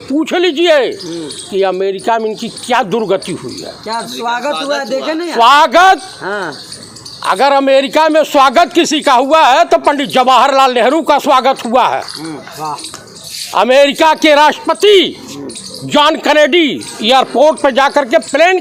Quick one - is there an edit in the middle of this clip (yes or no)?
no